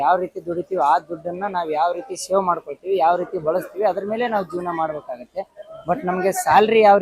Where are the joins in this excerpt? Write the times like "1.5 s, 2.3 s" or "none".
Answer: none